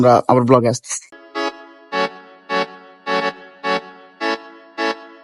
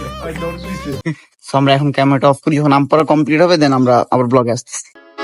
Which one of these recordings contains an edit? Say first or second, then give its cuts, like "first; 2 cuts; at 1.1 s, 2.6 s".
second; 1 cut; at 1.0 s